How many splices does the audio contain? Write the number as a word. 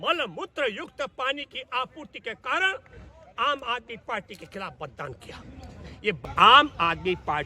one